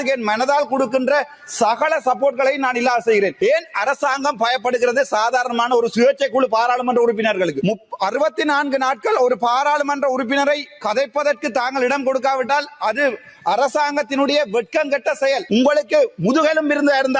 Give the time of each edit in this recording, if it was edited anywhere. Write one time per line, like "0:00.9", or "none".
0:03.3
0:07.6
0:15.4